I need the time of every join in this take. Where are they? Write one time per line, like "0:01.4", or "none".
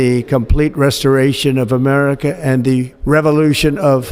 0:02.9